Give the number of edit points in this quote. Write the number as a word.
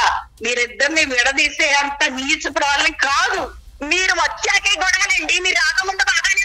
one